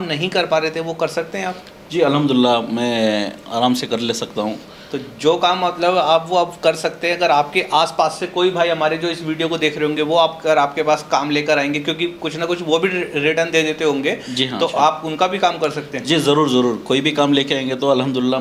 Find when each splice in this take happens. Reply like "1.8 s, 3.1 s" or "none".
none